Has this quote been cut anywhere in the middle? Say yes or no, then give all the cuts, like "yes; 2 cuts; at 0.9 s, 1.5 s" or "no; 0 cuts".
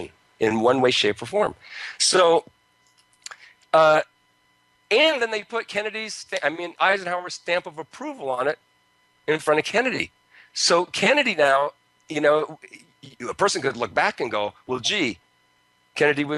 yes; 1 cut; at 1.7 s